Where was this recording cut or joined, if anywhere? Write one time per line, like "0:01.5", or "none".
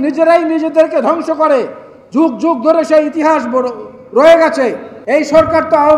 0:04.9